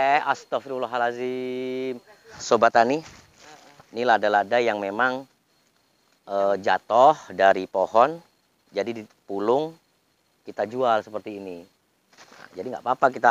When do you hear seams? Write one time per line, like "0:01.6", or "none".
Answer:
0:02.3